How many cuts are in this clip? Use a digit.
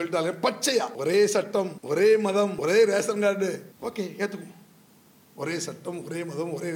4